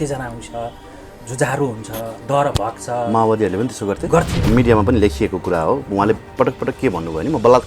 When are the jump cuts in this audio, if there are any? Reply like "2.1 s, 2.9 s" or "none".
4.5 s